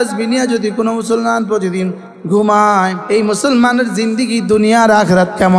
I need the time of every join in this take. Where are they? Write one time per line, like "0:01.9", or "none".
0:03.0